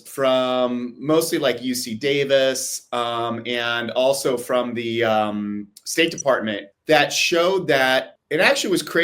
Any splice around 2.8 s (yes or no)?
no